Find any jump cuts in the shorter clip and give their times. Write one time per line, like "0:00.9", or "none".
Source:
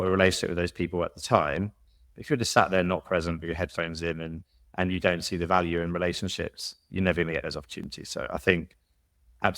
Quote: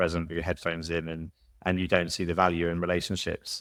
none